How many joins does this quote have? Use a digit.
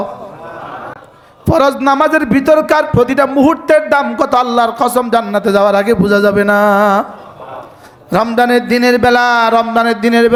0